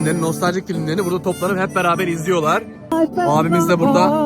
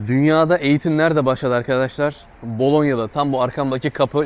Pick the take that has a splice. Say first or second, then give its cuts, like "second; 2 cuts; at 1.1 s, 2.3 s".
first; 1 cut; at 2.9 s